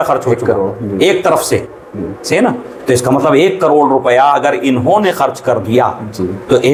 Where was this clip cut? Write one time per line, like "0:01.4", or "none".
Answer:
none